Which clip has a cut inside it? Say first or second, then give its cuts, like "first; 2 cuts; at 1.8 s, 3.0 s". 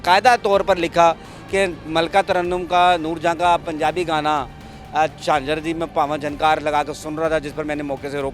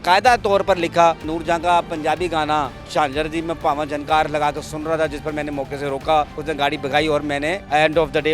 second; 3 cuts; at 1.3 s, 2.8 s, 6.4 s